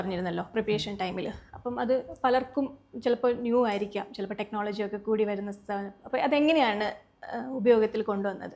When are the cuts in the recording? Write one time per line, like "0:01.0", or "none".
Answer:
none